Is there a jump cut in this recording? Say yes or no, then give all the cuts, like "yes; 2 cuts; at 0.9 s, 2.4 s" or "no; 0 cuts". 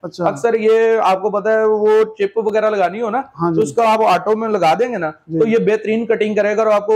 no; 0 cuts